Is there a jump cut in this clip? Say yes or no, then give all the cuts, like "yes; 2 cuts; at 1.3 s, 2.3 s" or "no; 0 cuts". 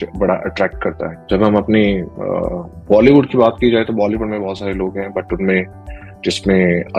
no; 0 cuts